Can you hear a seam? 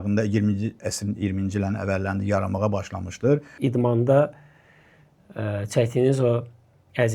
yes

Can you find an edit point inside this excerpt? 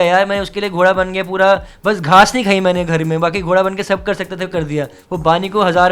yes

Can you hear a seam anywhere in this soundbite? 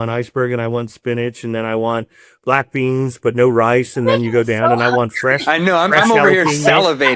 no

